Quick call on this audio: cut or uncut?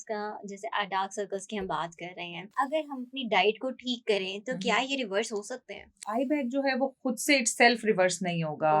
cut